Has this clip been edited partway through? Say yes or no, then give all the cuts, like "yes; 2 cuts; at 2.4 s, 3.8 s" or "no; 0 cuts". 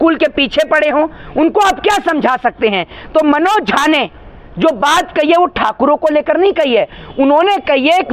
no; 0 cuts